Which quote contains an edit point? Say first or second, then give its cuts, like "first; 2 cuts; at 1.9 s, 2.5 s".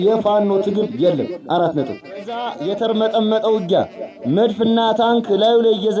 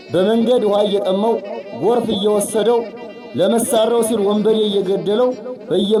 first; 1 cut; at 2.5 s